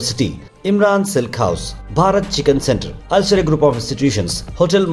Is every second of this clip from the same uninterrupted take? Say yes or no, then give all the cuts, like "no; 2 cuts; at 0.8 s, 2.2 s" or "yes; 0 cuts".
yes; 0 cuts